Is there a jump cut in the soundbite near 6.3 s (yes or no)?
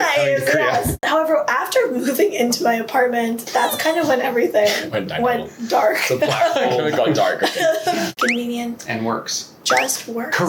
no